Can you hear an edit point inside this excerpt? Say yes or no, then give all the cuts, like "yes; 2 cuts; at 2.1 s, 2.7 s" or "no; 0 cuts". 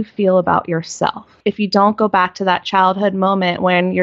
yes; 1 cut; at 1.3 s